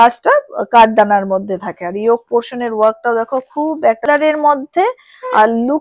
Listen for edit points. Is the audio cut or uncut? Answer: cut